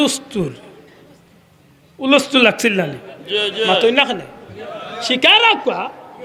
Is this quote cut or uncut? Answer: uncut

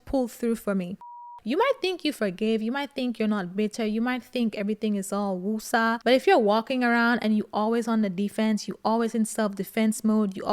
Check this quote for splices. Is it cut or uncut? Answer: cut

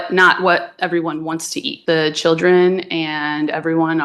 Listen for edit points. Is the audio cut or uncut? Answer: cut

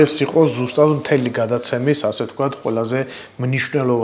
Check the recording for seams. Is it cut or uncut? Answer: uncut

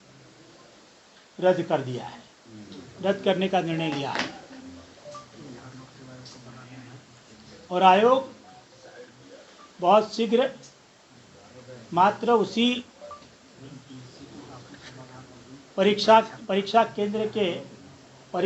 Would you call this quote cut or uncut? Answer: uncut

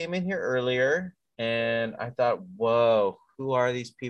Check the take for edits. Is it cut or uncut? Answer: cut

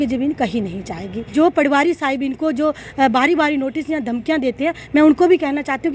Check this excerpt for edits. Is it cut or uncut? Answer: cut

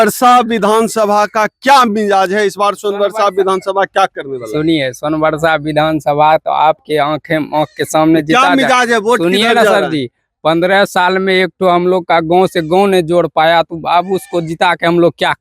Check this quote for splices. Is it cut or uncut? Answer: uncut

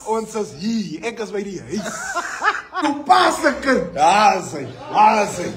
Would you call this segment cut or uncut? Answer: cut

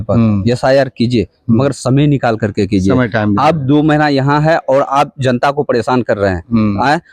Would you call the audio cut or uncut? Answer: uncut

